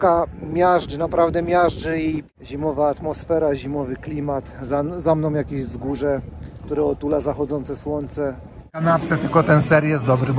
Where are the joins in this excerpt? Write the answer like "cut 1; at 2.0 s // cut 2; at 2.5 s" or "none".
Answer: cut 1; at 2.2 s // cut 2; at 8.8 s